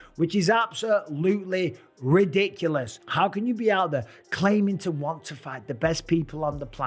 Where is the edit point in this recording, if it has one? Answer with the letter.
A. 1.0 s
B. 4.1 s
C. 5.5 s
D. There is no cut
D